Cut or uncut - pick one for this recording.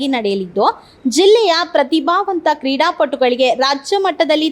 uncut